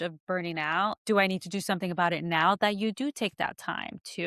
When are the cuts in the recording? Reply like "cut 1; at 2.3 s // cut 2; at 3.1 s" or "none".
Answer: none